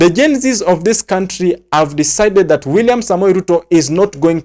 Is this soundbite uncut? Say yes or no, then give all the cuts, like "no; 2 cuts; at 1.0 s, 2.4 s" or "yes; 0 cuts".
yes; 0 cuts